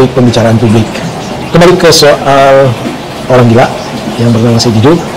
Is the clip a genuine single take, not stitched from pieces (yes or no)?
no